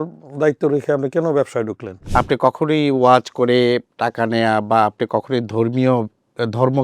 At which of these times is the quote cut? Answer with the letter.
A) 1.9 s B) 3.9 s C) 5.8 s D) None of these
A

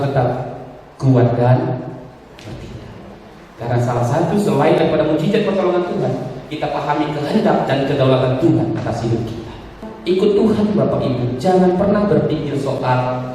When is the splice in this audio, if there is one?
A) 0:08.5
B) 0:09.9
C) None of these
B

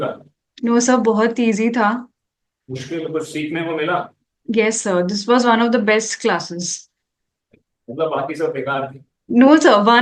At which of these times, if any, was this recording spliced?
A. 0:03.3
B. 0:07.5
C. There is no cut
C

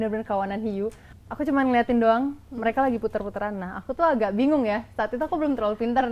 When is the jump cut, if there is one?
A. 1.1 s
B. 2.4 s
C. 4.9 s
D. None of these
A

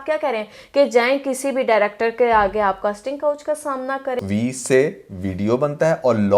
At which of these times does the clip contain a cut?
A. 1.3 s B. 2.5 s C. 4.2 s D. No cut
C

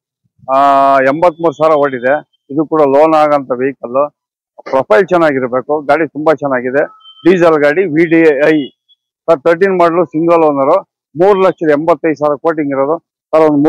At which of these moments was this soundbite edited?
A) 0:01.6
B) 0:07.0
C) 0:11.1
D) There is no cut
D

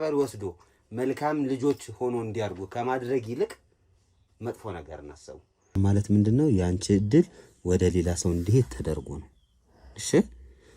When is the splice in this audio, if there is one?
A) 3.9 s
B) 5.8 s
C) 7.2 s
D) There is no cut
B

